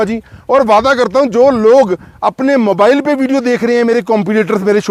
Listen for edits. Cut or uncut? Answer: uncut